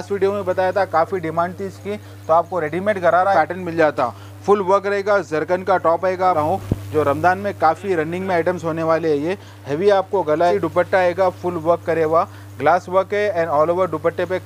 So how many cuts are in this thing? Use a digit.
3